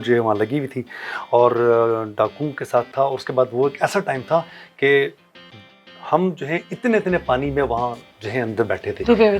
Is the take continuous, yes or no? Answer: yes